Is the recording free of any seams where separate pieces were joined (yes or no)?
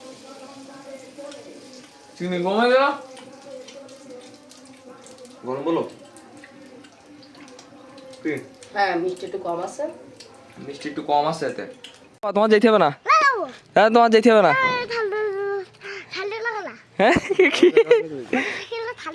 no